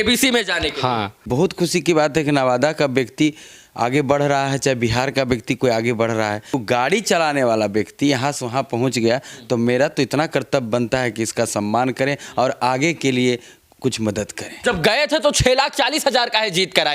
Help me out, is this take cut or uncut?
cut